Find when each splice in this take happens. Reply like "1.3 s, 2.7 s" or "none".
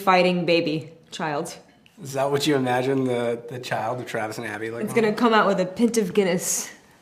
none